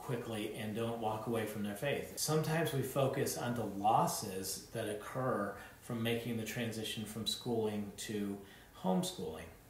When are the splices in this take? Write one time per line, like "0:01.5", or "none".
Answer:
0:02.1